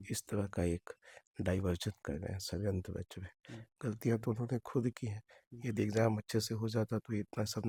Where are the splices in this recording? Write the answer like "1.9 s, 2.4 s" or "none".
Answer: none